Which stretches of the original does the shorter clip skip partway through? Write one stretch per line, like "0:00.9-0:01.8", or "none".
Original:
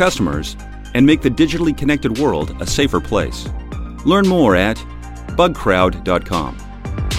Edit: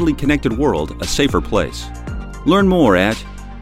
none